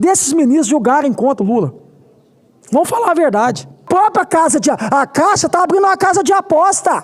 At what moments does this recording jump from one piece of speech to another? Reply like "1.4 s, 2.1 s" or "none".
3.9 s